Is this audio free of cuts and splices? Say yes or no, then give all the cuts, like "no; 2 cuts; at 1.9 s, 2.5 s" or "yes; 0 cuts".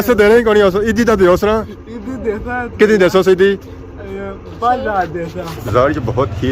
no; 1 cut; at 5.5 s